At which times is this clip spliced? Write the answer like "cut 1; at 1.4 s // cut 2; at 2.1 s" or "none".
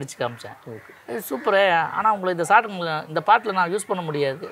none